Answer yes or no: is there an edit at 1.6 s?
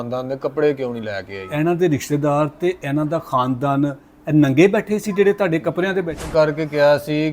no